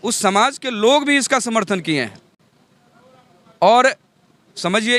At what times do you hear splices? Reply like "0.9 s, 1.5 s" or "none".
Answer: none